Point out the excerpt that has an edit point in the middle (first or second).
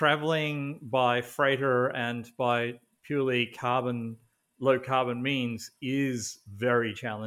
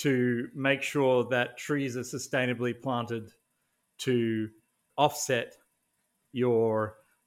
second